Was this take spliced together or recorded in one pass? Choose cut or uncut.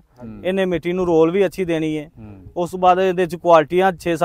uncut